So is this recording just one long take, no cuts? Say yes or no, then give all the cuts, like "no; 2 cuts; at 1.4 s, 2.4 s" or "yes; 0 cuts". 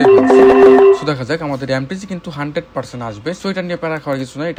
yes; 0 cuts